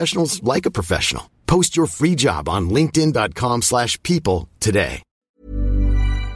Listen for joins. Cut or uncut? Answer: cut